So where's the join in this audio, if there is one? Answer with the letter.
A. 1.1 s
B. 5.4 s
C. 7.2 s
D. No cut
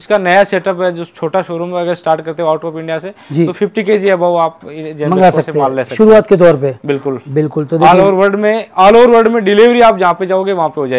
D